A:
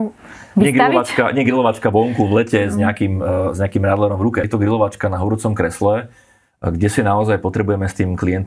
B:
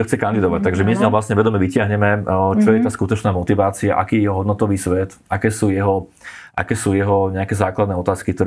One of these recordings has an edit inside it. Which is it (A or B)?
A